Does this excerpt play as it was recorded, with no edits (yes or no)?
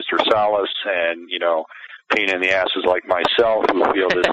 yes